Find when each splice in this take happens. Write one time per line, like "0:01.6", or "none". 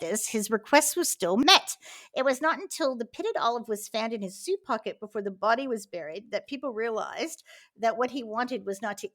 0:01.2